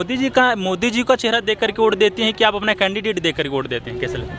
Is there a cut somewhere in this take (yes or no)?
no